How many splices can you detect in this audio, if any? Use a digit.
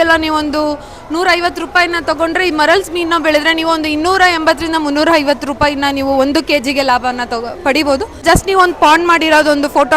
1